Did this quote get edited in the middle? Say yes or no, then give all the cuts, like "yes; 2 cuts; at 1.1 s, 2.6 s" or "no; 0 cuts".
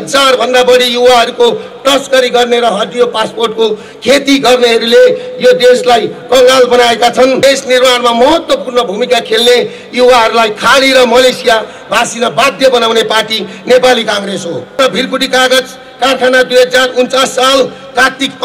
yes; 2 cuts; at 7.4 s, 14.7 s